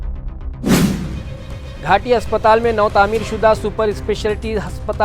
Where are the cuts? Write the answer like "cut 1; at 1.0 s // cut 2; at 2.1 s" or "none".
cut 1; at 1.2 s